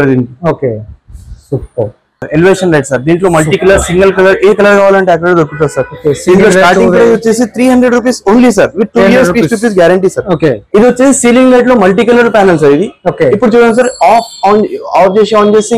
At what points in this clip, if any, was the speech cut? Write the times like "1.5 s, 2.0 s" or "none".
2.2 s, 10.6 s

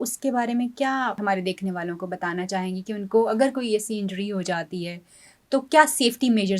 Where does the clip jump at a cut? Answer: 1.2 s

